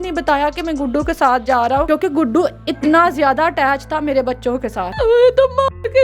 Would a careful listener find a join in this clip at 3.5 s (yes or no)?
no